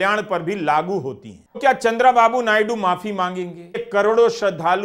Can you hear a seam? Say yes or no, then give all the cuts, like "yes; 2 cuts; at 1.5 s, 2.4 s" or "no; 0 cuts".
yes; 2 cuts; at 1.6 s, 3.9 s